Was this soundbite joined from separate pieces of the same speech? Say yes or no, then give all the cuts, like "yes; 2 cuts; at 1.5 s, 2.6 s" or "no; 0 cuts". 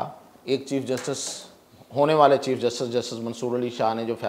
no; 0 cuts